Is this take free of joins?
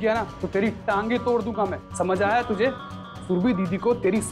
yes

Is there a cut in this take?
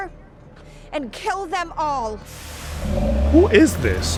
no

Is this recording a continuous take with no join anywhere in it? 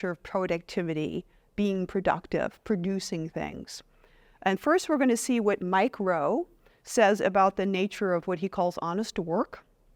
yes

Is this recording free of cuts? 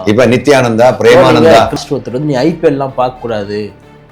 no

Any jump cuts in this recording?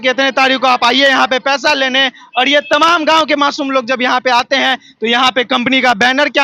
no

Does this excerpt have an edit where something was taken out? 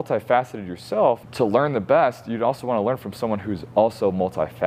yes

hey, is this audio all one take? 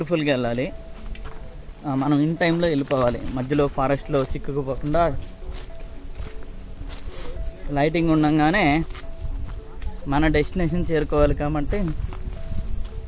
yes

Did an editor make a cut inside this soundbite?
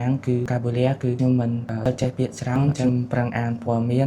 yes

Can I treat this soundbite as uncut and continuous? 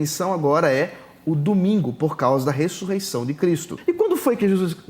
no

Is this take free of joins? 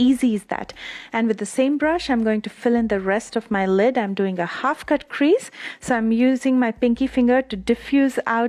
yes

